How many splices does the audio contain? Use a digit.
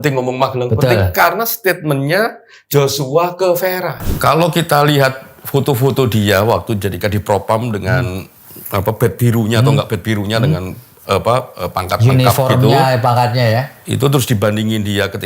1